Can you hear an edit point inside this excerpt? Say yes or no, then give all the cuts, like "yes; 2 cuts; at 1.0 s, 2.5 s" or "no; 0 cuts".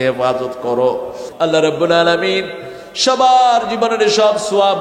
yes; 1 cut; at 1.2 s